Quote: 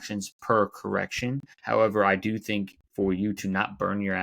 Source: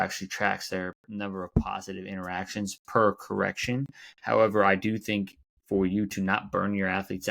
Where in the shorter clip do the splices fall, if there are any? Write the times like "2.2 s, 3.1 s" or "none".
1.5 s, 2.8 s